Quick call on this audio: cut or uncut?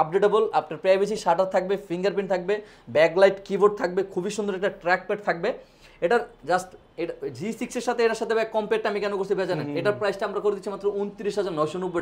uncut